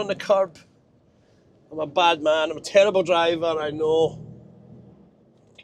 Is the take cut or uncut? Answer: uncut